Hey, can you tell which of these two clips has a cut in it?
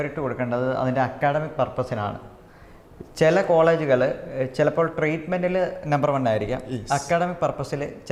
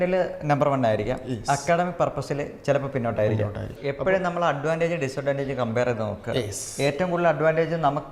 second; 1 cut; at 3.7 s

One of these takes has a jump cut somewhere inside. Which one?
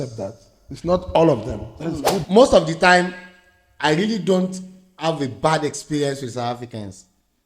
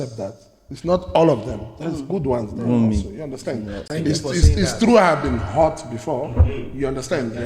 first; 1 cut; at 2.1 s

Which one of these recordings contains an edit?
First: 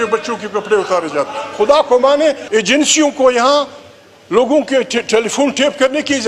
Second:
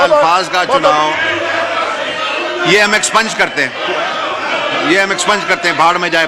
first; 1 cut; at 2.4 s

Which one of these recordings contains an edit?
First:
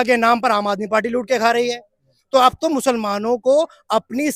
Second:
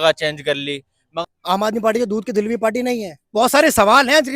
second; 2 cuts; at 1.2 s, 3.3 s

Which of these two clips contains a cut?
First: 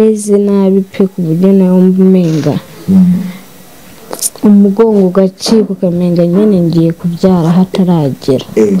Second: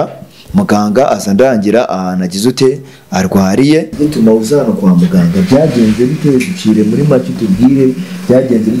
second; 1 cut; at 3.9 s

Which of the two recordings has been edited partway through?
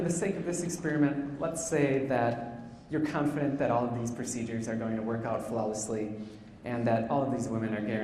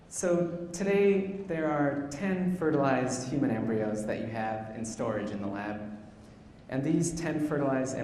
second; 1 cut; at 5.2 s

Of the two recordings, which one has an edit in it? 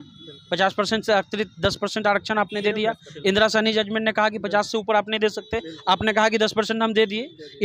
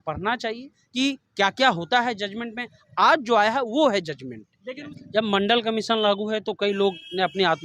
second; 1 cut; at 4.9 s

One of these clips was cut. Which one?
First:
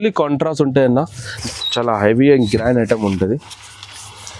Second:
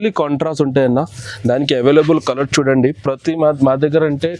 first; 1 cut; at 1.3 s

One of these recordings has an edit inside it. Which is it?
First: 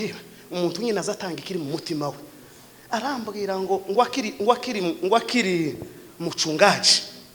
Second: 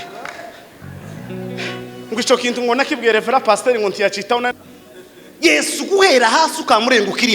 second; 1 cut; at 4.5 s

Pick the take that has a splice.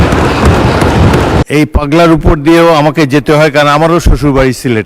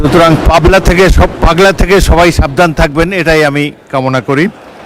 first; 1 cut; at 1.4 s

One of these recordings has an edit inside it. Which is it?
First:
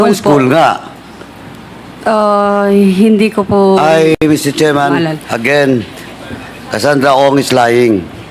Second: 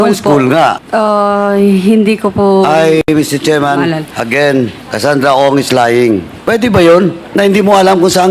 second; 4 cuts; at 0.8 s, 4.8 s, 6.3 s, 7.2 s

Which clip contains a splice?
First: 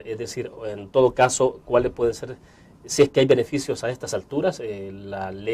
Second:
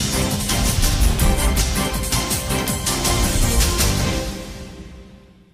first; 1 cut; at 3.1 s

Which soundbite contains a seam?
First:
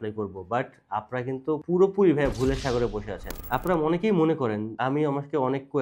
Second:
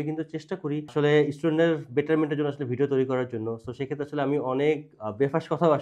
first; 3 cuts; at 1.6 s, 3.3 s, 4.7 s

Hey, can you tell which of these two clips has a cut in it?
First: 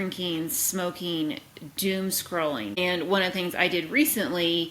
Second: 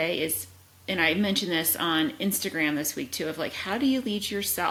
first; 1 cut; at 2.8 s

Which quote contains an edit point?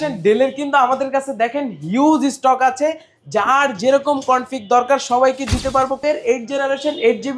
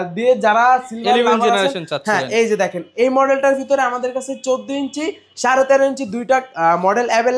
first; 1 cut; at 6.0 s

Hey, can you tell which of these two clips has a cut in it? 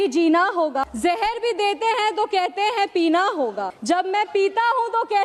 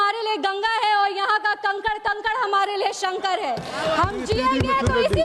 first; 2 cuts; at 0.9 s, 3.7 s

